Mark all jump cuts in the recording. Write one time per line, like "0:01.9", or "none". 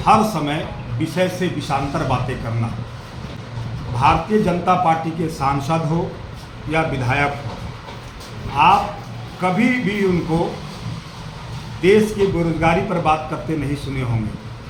none